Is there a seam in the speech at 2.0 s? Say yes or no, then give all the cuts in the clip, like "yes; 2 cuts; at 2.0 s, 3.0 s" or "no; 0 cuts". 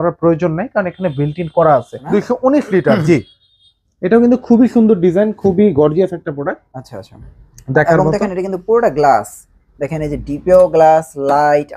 yes; 1 cut; at 2.0 s